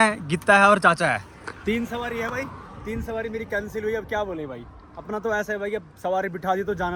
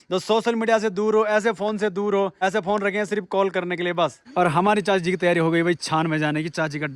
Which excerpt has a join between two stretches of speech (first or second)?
second